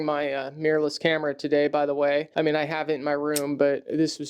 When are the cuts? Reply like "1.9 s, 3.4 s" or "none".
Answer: 2.3 s